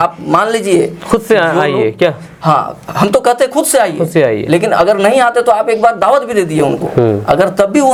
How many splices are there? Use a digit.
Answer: 0